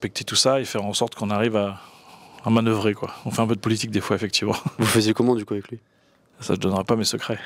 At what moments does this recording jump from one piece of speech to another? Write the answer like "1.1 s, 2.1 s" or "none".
none